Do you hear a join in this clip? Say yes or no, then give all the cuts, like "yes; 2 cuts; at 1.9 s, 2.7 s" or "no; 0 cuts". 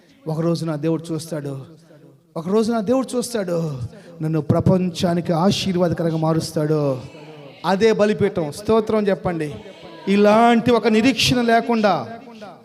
no; 0 cuts